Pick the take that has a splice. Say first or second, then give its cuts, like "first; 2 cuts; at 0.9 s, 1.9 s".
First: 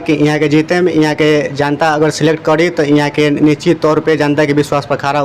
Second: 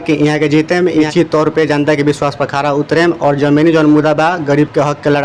second; 1 cut; at 1.1 s